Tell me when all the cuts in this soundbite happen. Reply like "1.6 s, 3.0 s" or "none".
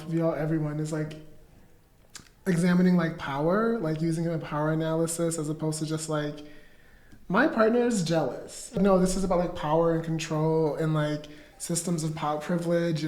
8.8 s

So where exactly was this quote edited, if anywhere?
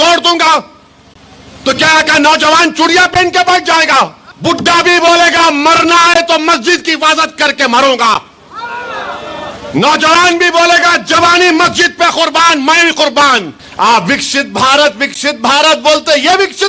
4.3 s, 13.6 s

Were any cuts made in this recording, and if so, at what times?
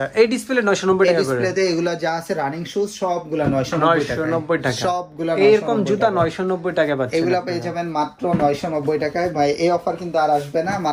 none

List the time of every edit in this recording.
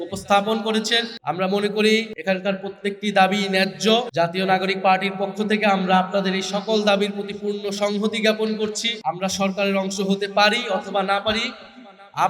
1.1 s, 2.1 s, 4.1 s, 8.9 s

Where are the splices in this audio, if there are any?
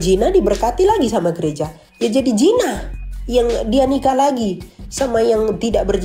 none

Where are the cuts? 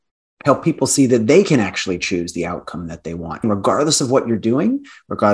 3.4 s

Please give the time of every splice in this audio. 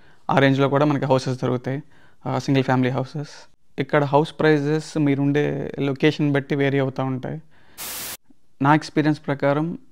none

